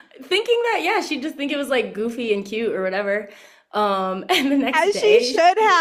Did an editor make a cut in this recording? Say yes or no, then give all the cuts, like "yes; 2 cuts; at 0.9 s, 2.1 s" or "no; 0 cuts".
no; 0 cuts